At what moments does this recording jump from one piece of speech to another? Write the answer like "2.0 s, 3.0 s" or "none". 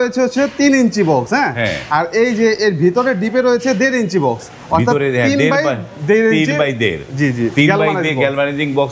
none